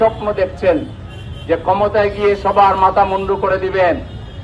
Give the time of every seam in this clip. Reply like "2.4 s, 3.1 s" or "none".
none